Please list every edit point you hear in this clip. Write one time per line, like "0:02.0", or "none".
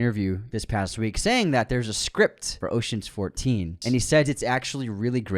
0:02.5
0:03.7